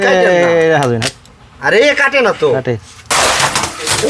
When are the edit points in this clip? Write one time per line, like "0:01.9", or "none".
0:03.0